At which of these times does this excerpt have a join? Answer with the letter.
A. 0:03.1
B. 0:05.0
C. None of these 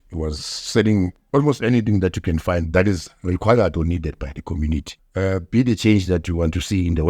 B